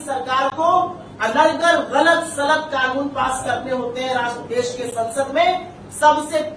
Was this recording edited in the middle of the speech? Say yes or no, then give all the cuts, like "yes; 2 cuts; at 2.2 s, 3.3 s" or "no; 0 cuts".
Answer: no; 0 cuts